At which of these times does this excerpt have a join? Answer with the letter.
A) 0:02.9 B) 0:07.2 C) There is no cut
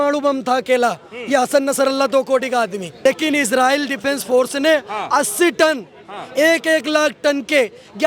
A